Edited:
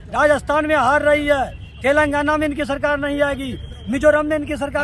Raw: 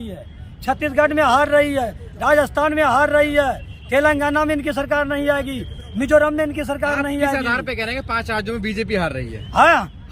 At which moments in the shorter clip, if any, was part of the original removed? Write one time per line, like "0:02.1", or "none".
none